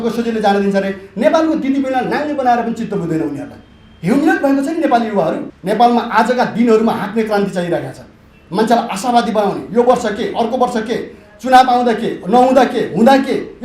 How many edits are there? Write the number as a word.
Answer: one